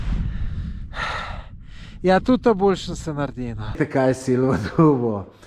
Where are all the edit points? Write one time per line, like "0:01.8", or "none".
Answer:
0:03.8